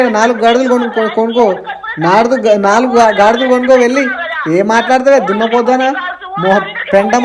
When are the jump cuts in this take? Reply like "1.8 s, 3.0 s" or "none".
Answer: none